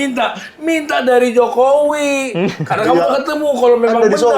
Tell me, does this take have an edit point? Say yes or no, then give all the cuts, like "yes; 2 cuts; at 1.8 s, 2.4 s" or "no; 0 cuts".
no; 0 cuts